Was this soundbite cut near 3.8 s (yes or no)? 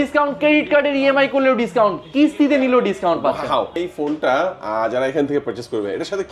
yes